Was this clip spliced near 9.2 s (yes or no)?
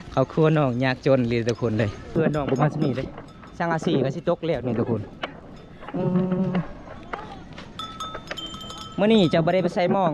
no